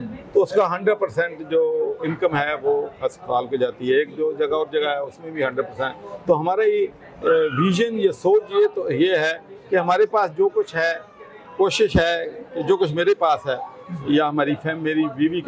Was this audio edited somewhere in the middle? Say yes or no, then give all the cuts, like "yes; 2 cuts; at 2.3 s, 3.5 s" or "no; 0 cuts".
no; 0 cuts